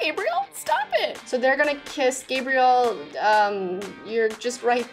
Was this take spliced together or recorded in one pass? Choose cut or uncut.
cut